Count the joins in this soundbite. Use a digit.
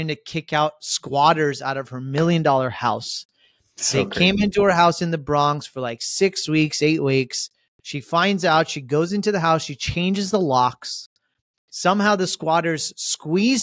0